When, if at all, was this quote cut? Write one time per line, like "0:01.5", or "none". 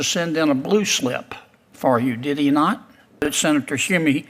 0:03.3